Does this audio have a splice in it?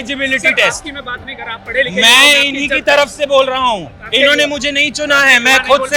no; 0 cuts

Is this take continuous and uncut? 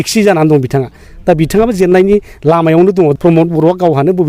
no; 1 cut; at 3.1 s

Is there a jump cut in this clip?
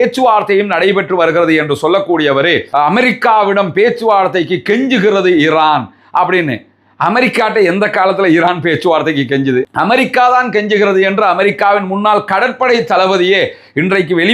yes; 1 cut; at 2.7 s

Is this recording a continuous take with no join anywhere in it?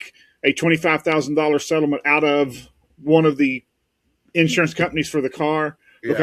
yes; 0 cuts

